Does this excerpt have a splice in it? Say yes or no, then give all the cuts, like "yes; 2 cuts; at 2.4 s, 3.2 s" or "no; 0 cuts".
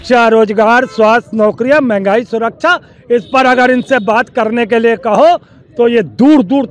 no; 0 cuts